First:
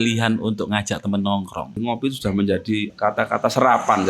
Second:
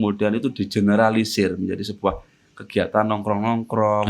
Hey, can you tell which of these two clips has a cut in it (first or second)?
first